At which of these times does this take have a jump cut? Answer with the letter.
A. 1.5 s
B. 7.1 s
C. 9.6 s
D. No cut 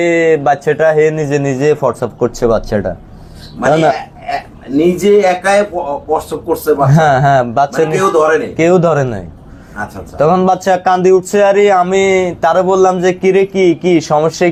D